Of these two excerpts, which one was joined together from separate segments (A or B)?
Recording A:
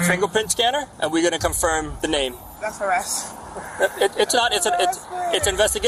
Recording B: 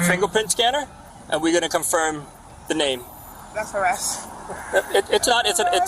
A